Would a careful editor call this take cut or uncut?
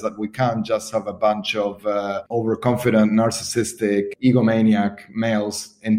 cut